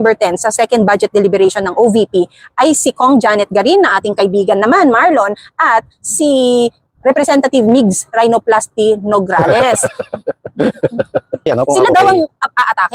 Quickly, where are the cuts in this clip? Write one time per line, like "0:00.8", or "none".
0:11.5